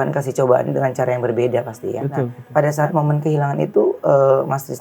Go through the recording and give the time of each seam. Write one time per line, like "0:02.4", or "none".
0:02.4

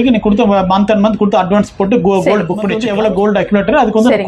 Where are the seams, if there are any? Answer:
0:02.7

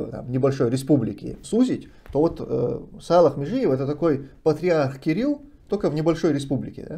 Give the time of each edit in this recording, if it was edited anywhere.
0:01.3

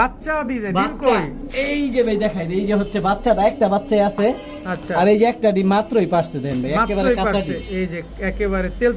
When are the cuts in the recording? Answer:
none

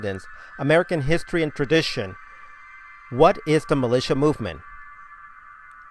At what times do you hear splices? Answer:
0:01.3

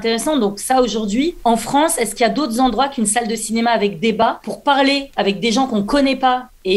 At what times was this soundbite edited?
0:01.4
0:04.2

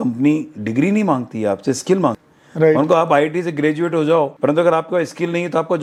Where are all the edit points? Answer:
none

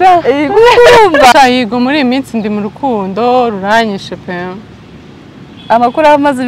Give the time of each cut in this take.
0:01.3

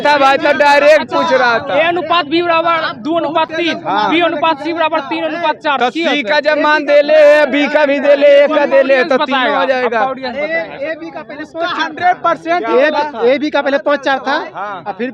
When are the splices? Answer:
none

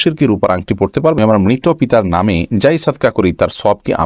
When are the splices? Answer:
0:01.2

